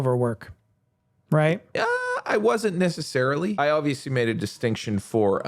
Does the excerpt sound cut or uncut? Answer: cut